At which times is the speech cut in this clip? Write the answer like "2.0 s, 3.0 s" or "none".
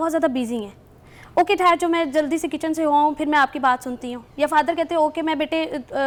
none